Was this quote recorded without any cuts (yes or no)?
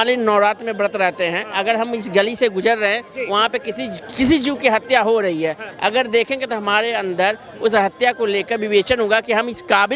yes